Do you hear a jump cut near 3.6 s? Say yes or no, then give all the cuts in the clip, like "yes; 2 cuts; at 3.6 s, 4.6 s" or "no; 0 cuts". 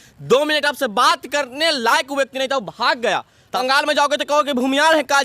yes; 1 cut; at 3.6 s